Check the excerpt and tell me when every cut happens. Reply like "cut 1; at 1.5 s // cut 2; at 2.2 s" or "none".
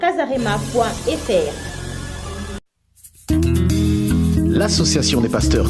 cut 1; at 2.6 s